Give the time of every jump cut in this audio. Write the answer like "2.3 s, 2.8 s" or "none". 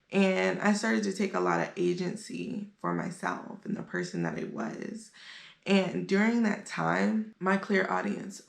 7.3 s

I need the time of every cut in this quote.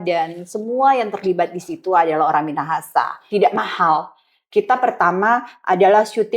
3.2 s

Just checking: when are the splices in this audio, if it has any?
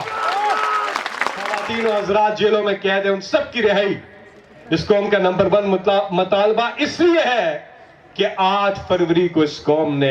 1.7 s

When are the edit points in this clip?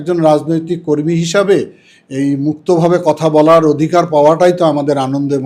none

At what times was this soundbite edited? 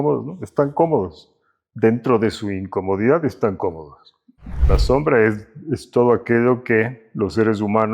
4.6 s, 7.0 s

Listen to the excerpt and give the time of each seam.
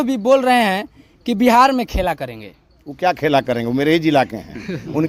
none

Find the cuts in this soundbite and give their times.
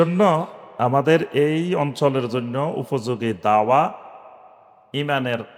none

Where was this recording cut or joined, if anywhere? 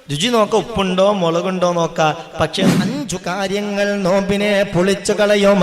2.7 s

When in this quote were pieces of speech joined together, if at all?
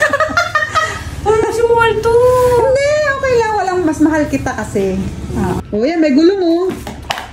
5.6 s

